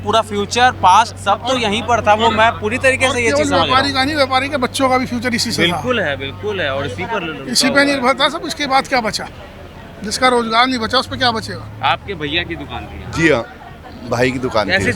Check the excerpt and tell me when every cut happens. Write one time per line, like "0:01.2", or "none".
none